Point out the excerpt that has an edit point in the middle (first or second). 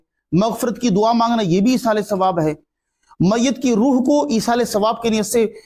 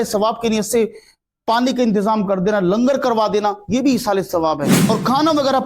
second